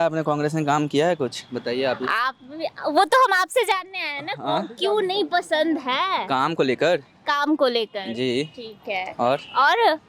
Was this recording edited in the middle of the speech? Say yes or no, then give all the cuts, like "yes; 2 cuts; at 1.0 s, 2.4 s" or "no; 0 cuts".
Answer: no; 0 cuts